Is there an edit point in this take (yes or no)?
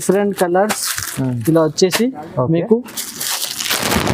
no